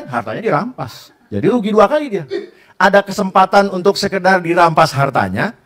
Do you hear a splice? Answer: no; 0 cuts

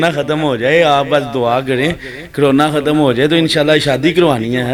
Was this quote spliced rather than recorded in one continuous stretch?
no; 0 cuts

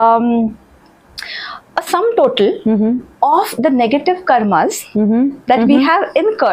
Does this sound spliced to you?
no; 0 cuts

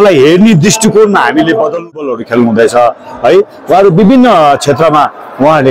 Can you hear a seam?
yes; 1 cut; at 2.1 s

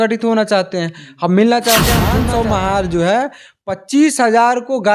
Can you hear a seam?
yes; 1 cut; at 2.0 s

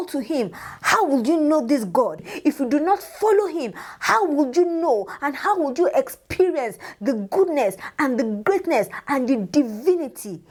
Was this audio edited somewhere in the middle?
no; 0 cuts

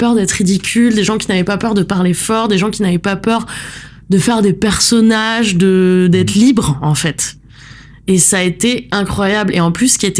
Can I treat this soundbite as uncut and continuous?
yes; 0 cuts

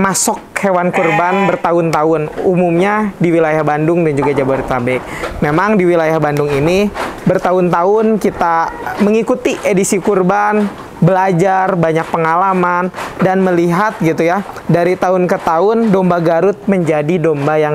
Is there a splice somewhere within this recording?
no; 0 cuts

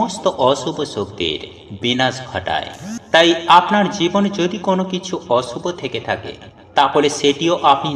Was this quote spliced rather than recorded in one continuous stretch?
no; 0 cuts

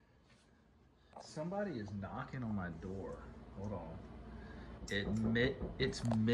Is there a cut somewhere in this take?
yes; 1 cut; at 1.1 s

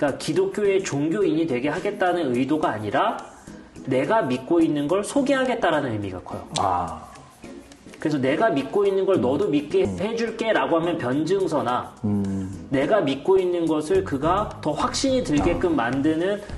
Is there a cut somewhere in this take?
no; 0 cuts

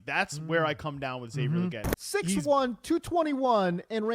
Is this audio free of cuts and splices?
no; 1 cut; at 1.9 s

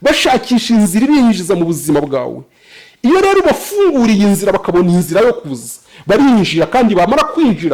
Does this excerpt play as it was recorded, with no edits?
yes; 0 cuts

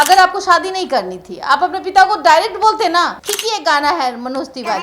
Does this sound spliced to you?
yes; 1 cut; at 3.2 s

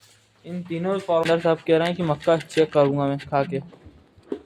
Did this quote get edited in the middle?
yes; 1 cut; at 1.3 s

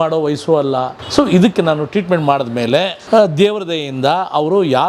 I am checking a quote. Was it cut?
yes; 2 cuts; at 1.0 s, 3.0 s

